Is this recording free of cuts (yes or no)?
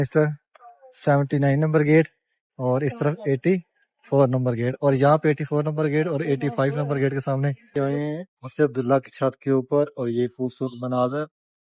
no